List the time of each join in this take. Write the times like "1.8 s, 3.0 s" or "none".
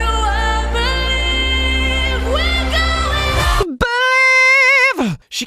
2.1 s, 3.6 s

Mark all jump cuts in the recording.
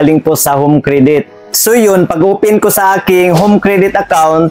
1.4 s

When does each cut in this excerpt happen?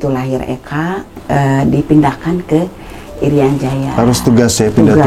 1.1 s

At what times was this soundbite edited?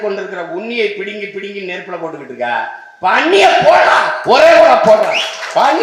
none

